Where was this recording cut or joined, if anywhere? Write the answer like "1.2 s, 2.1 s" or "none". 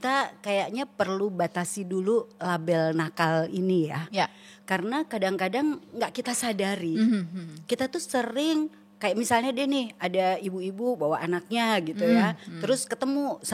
none